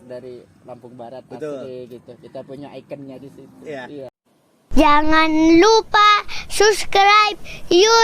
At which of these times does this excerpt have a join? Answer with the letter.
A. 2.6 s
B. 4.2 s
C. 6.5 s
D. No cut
B